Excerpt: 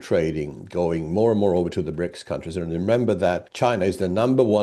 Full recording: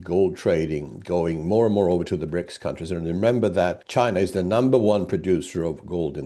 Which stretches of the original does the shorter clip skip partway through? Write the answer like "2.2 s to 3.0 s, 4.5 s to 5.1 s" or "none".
none